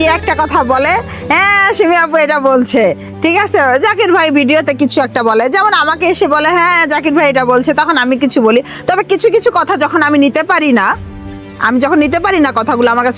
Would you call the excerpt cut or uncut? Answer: uncut